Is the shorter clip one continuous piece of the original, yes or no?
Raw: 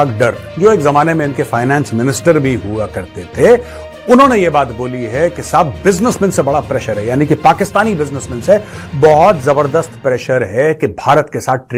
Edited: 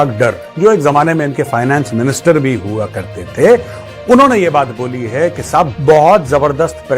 no